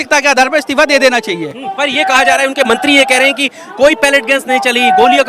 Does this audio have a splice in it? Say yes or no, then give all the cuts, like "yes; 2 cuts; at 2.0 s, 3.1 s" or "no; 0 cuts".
no; 0 cuts